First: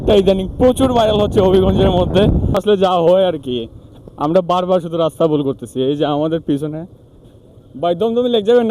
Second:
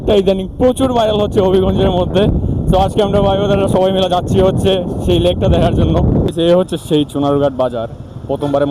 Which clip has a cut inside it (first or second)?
first